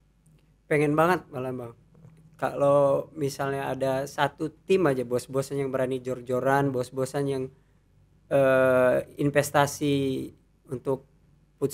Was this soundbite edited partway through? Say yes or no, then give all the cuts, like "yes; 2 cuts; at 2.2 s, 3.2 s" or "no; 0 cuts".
no; 0 cuts